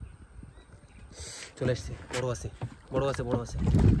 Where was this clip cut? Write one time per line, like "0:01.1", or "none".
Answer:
none